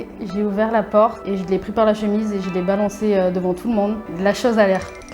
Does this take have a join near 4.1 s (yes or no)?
yes